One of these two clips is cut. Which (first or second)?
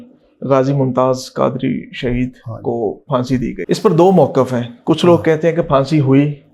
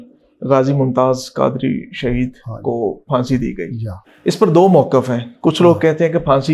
first